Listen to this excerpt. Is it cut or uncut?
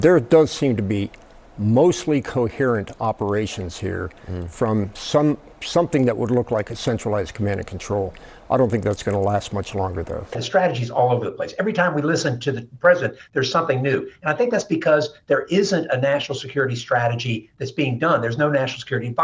uncut